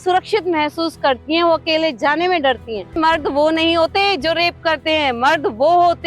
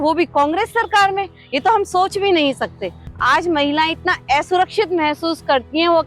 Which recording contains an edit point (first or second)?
first